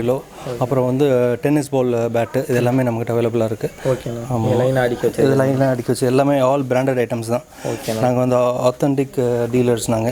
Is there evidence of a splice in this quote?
no; 0 cuts

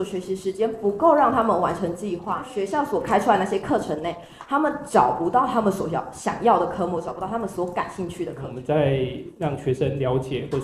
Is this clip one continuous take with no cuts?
no; 2 cuts; at 2.5 s, 8.5 s

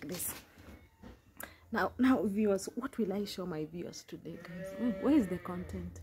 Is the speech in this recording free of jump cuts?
yes; 0 cuts

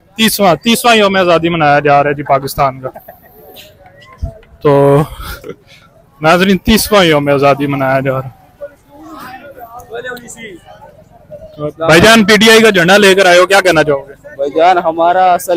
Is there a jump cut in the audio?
no; 0 cuts

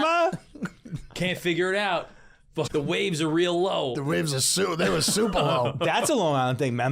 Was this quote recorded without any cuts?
no; 1 cut; at 2.7 s

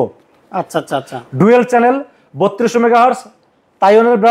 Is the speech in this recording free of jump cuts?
yes; 0 cuts

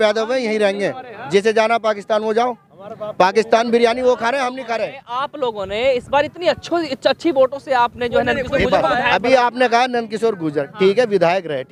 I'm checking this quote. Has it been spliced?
no; 0 cuts

